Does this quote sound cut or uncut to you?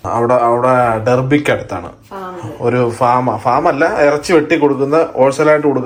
uncut